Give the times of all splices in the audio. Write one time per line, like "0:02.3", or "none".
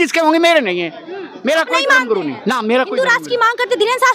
none